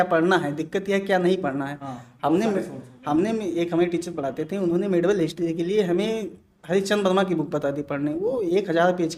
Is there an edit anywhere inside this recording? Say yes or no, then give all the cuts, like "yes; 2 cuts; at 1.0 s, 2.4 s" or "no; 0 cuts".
no; 0 cuts